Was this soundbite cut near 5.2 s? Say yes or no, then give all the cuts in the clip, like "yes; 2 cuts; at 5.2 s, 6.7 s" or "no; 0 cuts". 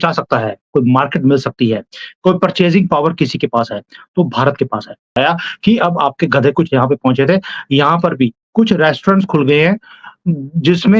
yes; 1 cut; at 5.2 s